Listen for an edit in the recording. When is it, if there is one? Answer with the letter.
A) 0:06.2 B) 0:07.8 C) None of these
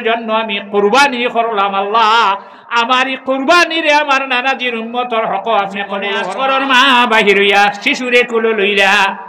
A